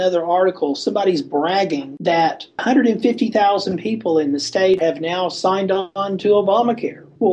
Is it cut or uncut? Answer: cut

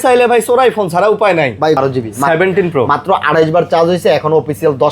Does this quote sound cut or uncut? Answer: cut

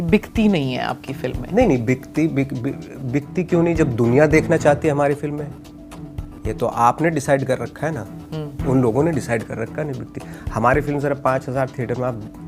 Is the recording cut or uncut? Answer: uncut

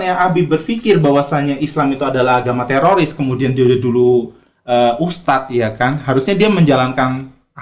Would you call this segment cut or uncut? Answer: uncut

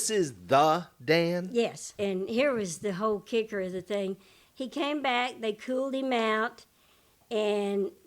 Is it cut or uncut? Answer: cut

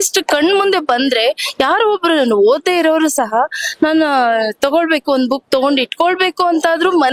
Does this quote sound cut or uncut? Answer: uncut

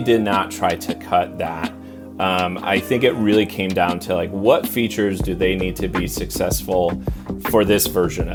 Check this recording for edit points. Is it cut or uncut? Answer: uncut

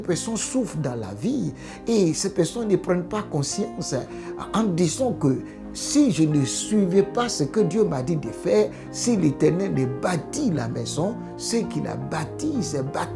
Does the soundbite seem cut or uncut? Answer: uncut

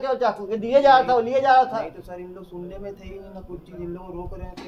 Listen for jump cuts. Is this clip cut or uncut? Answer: uncut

